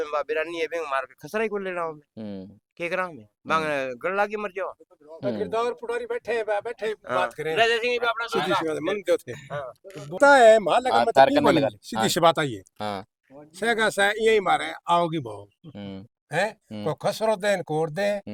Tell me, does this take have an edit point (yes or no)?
no